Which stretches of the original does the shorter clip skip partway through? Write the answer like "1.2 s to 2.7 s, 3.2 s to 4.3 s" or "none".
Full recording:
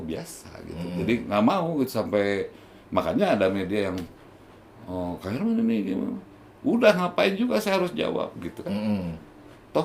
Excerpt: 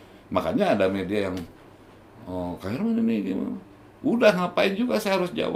none

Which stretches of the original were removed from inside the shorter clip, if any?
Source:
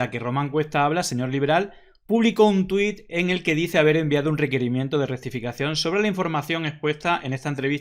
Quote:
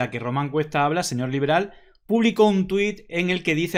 none

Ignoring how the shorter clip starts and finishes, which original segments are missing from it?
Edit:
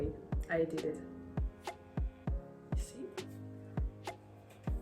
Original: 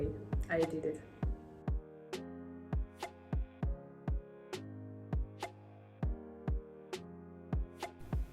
1.0 s to 2.4 s

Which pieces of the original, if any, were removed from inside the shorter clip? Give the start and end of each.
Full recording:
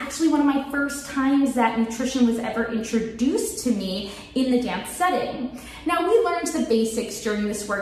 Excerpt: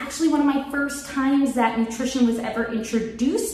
none

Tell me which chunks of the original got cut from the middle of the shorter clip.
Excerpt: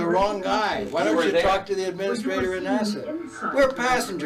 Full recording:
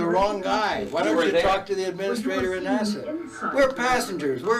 none

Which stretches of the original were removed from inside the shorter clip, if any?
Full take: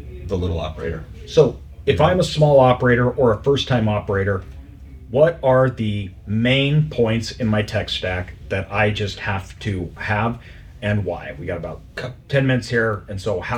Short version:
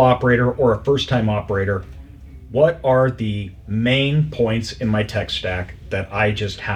none

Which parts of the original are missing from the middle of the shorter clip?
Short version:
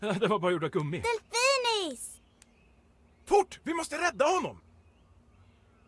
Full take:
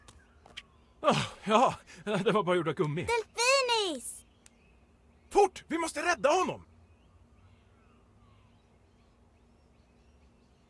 none

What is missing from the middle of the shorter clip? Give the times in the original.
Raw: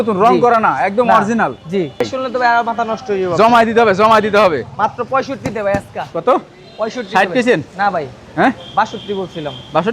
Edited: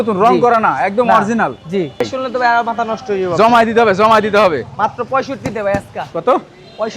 none

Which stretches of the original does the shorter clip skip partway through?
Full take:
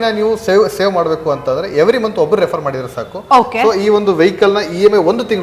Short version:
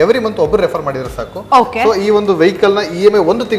none

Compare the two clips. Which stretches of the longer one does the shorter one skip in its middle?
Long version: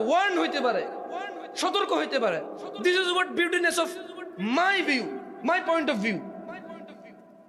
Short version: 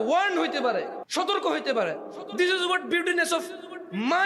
1.0 s to 1.5 s

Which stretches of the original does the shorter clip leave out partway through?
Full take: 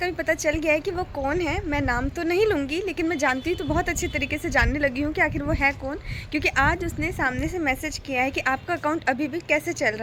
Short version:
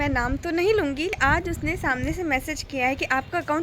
2.9 s to 6.5 s

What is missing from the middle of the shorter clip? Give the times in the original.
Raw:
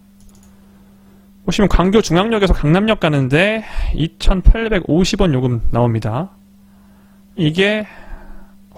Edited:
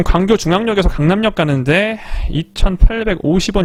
none

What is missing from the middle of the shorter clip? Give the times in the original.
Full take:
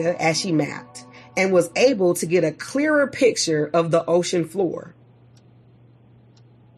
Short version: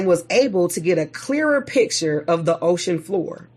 none

